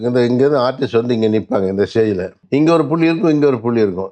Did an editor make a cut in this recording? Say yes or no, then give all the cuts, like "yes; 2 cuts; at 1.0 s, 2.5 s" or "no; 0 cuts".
yes; 1 cut; at 2.3 s